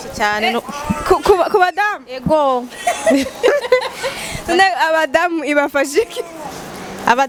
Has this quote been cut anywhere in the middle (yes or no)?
no